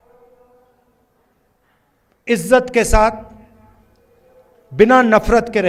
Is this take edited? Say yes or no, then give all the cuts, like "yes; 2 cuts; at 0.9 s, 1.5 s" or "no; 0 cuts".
no; 0 cuts